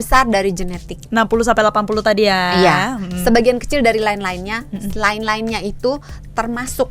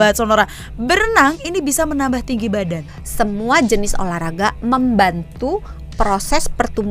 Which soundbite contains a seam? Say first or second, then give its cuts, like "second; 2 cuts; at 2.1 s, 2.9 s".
second; 1 cut; at 2.9 s